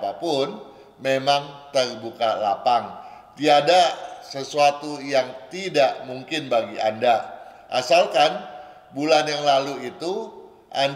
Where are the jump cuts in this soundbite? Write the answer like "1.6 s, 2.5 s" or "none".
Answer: none